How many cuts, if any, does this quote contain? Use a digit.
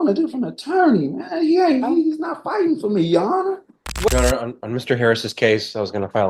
1